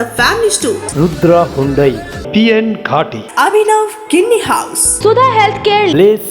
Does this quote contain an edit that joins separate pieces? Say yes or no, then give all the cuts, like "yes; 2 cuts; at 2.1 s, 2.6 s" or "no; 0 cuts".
yes; 1 cut; at 4.8 s